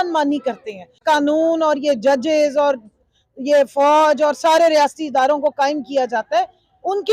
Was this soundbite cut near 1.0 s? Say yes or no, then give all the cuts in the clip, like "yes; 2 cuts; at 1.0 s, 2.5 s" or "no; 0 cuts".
yes; 1 cut; at 1.0 s